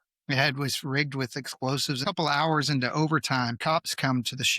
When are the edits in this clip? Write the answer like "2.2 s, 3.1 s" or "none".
2.0 s, 3.6 s